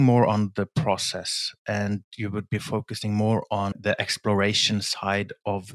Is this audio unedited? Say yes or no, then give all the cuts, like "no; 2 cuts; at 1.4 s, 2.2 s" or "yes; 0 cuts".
yes; 0 cuts